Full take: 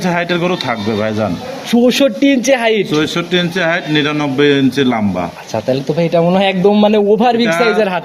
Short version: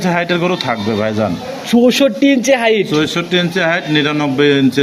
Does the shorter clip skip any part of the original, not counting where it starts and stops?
no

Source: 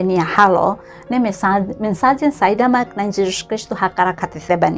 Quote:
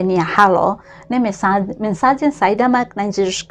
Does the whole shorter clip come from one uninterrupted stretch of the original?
yes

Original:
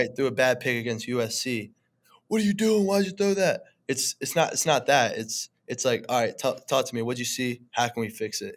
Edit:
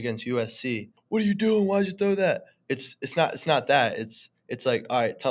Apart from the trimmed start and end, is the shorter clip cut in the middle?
yes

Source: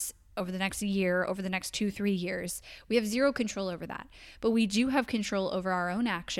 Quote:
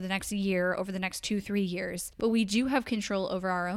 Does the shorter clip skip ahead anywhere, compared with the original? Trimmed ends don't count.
yes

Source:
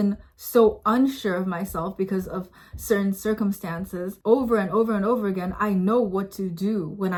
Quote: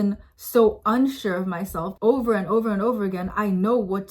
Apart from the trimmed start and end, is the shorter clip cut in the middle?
yes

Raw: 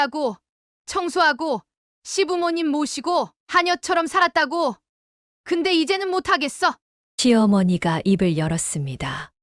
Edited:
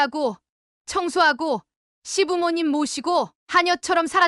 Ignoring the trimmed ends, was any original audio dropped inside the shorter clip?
no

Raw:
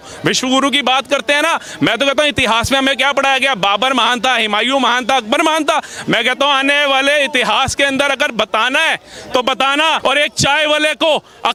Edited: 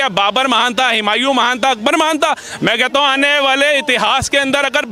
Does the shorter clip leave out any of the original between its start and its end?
no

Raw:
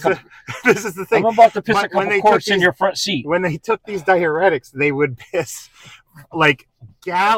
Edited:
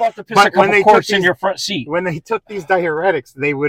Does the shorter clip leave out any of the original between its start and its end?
no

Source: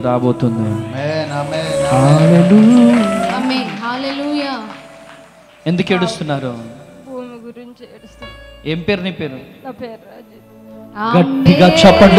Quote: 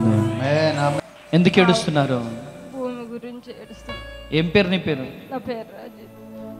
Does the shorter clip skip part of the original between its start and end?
yes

